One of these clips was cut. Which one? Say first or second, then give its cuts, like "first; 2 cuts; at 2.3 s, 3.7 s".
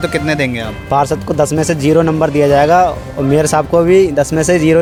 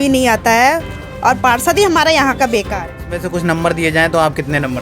second; 1 cut; at 3.2 s